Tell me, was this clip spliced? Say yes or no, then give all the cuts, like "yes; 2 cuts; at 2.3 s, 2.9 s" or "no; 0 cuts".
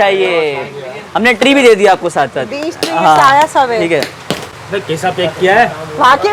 no; 0 cuts